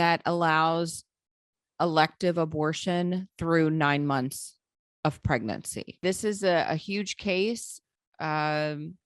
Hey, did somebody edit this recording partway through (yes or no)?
yes